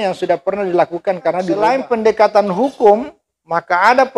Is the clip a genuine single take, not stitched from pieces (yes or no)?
no